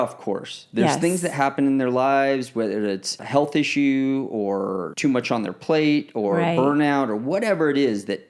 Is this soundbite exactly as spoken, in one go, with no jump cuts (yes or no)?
no